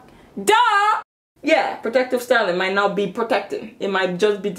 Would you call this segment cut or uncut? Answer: cut